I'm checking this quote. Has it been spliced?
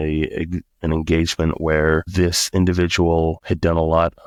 no; 0 cuts

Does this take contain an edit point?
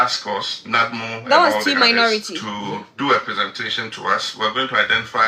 no; 0 cuts

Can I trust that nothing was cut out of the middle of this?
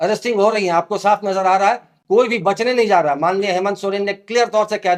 yes; 0 cuts

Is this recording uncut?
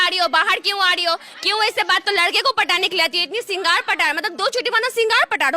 no; 1 cut; at 2.0 s

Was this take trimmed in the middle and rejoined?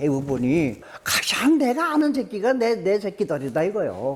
yes; 1 cut; at 0.9 s

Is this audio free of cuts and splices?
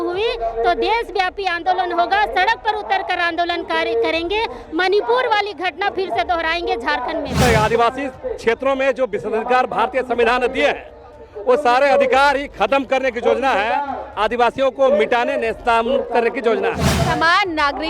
no; 2 cuts; at 7.4 s, 16.9 s

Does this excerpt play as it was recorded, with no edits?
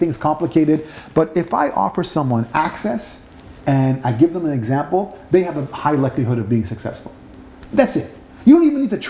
yes; 0 cuts

